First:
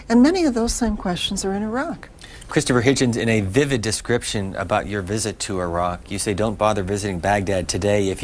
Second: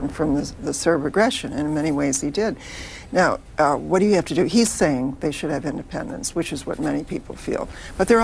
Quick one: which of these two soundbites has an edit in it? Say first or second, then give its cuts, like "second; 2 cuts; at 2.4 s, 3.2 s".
first; 1 cut; at 4.3 s